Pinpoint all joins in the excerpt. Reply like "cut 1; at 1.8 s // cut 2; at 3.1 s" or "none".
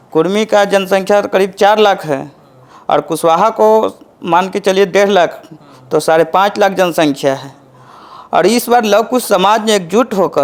none